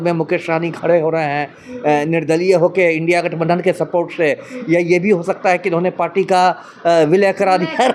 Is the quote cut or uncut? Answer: uncut